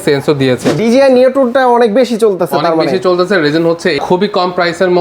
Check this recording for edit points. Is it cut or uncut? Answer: cut